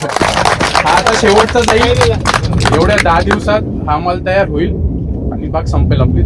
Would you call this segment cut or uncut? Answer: uncut